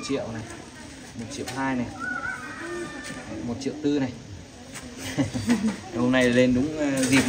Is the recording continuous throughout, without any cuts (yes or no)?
yes